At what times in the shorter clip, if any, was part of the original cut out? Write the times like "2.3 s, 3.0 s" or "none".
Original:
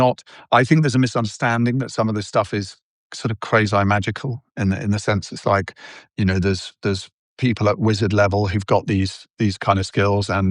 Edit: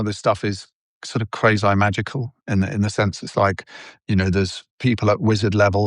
4.6 s